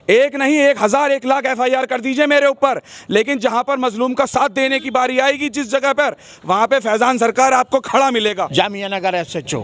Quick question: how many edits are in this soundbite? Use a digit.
1